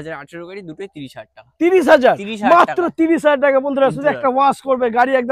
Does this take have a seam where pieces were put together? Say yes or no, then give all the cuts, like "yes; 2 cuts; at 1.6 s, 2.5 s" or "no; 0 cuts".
no; 0 cuts